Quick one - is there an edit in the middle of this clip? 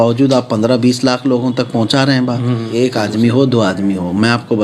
yes; 1 cut; at 2.8 s

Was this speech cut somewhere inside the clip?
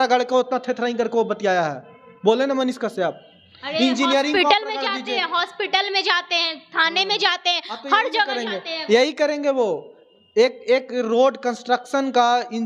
no; 0 cuts

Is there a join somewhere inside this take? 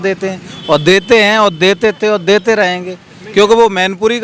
no; 0 cuts

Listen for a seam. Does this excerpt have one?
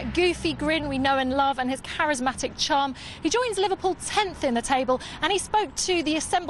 yes; 1 cut; at 1.8 s

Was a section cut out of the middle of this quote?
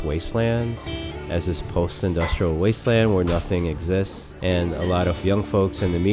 yes; 2 cuts; at 4.2 s, 5.2 s

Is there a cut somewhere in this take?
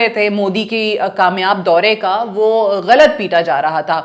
no; 0 cuts

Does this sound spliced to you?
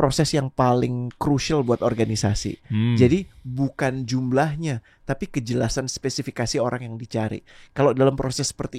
no; 0 cuts

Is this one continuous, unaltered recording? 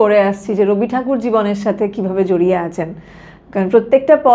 yes; 0 cuts

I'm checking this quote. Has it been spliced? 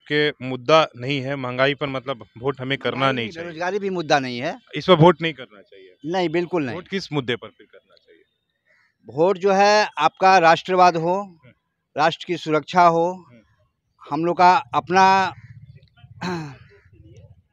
no; 0 cuts

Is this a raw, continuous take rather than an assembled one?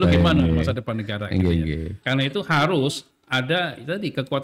no; 1 cut; at 1.9 s

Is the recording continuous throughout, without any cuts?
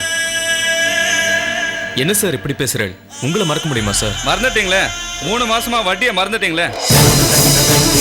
yes; 0 cuts

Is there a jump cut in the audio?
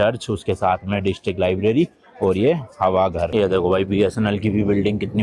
yes; 1 cut; at 3.3 s

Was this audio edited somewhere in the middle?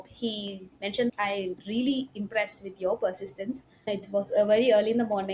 yes; 2 cuts; at 1.1 s, 3.9 s

